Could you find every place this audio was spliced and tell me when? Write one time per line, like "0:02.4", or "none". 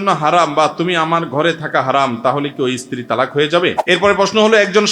0:03.8